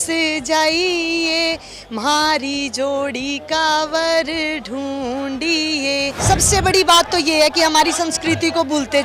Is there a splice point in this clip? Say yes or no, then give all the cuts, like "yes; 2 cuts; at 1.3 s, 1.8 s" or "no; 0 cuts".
yes; 1 cut; at 6.2 s